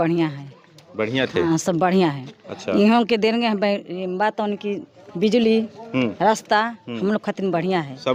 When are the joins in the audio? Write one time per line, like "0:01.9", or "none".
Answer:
none